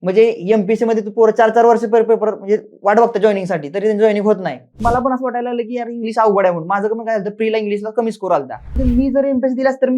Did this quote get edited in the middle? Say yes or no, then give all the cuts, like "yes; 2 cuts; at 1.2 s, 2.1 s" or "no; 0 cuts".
yes; 2 cuts; at 4.8 s, 8.8 s